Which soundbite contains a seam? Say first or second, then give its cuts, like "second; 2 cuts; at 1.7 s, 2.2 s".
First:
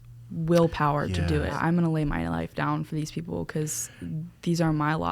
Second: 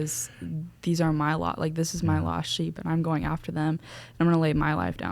first; 1 cut; at 1.6 s